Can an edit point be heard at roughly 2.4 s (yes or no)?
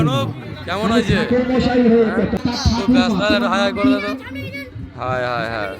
yes